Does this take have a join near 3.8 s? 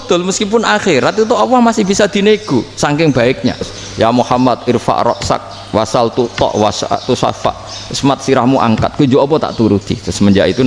yes; 1 cut; at 3.8 s

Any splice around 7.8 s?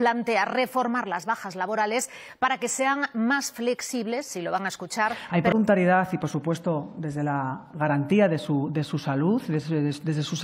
no; 1 cut; at 5.5 s

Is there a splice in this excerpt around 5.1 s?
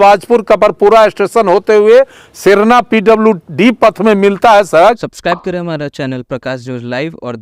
yes; 1 cut; at 5.1 s

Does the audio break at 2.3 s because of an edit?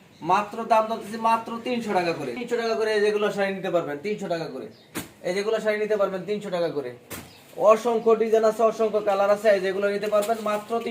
yes; 1 cut; at 2.3 s

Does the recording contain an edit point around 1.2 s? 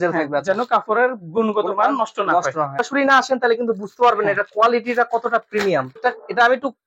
no; 2 cuts; at 2.8 s, 5.9 s

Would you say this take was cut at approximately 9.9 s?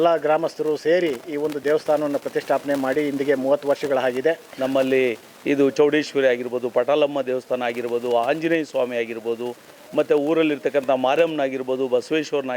no; 1 cut; at 4.5 s

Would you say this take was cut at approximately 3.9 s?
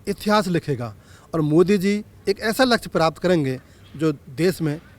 no; 1 cut; at 2.1 s

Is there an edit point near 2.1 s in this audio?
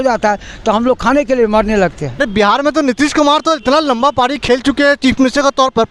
yes; 1 cut; at 2.1 s

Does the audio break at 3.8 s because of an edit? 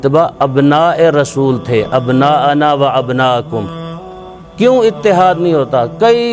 yes; 1 cut; at 3.8 s

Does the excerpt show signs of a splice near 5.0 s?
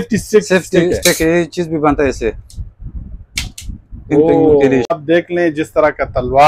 yes; 1 cut; at 5.0 s

